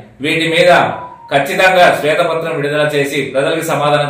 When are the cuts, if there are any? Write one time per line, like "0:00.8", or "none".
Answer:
none